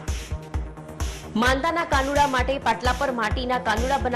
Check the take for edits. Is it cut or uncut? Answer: cut